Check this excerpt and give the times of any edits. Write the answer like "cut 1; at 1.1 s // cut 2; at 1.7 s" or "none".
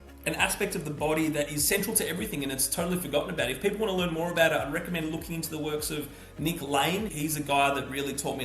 cut 1; at 7.1 s